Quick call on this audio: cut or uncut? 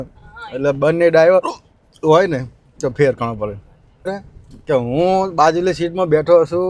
cut